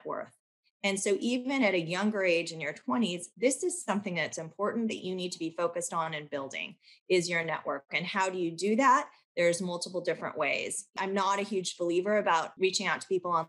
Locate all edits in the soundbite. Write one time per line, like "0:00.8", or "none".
0:10.9
0:12.5